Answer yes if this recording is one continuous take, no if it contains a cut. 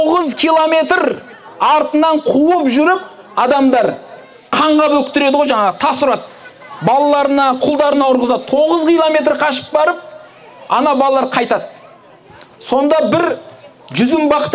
yes